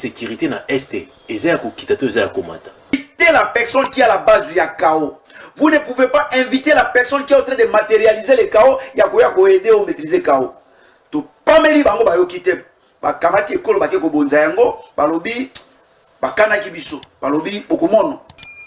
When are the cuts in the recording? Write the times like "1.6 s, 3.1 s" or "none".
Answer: 2.9 s